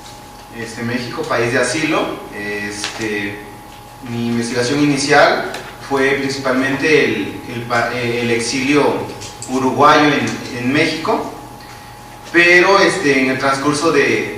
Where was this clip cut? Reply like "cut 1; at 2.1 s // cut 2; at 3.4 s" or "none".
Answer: cut 1; at 7.0 s